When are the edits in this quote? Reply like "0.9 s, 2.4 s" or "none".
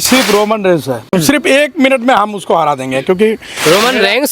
1.1 s